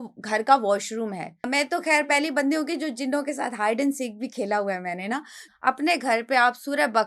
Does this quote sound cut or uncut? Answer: cut